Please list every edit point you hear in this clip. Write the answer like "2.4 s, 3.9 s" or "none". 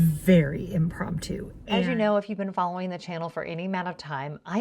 1.5 s